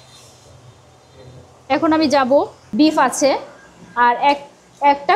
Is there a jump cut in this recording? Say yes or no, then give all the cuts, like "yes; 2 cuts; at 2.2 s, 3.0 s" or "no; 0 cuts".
yes; 1 cut; at 2.6 s